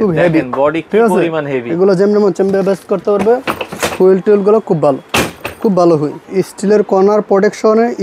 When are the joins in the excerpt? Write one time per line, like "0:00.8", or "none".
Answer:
0:06.2